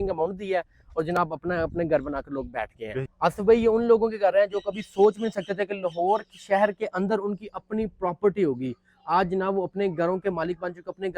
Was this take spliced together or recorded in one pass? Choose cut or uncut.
cut